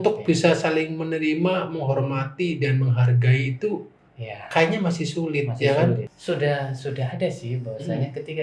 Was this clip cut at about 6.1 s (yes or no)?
yes